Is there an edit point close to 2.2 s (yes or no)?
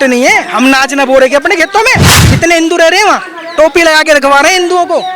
yes